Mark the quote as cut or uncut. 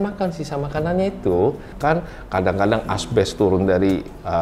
cut